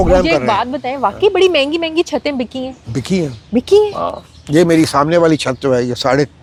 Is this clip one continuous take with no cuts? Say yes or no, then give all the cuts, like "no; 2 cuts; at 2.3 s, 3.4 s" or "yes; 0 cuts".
yes; 0 cuts